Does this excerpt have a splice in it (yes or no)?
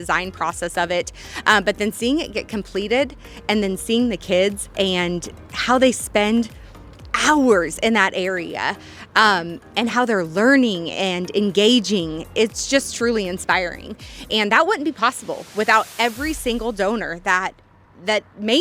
no